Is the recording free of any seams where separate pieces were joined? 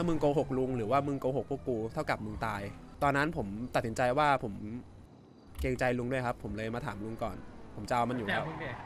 no; 1 cut; at 2.8 s

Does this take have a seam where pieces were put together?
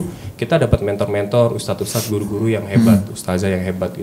no; 0 cuts

